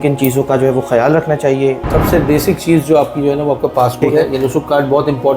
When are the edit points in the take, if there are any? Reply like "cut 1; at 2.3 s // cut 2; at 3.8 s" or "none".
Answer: cut 1; at 1.8 s // cut 2; at 4.0 s